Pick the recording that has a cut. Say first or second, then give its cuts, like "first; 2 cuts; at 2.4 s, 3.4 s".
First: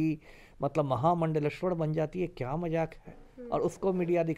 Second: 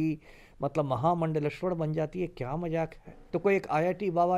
second; 1 cut; at 3.2 s